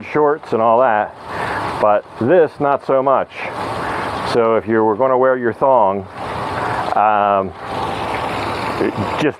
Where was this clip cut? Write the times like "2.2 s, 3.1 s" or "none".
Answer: none